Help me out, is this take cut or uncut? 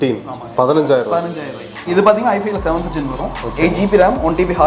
cut